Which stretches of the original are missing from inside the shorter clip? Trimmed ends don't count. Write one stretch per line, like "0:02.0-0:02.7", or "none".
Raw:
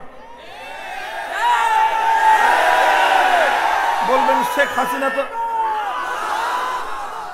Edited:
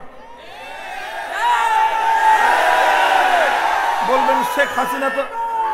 none